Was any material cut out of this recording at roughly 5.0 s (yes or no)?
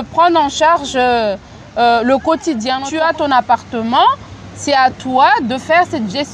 no